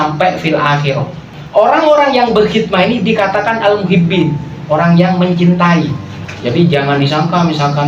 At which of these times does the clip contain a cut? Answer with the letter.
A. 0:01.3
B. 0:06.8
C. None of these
A